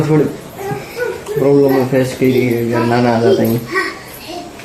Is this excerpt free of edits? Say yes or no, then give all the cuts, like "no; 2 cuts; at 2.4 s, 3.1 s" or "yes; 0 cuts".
yes; 0 cuts